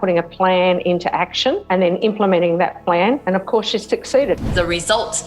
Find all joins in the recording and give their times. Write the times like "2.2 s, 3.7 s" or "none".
1.6 s, 3.2 s, 4.4 s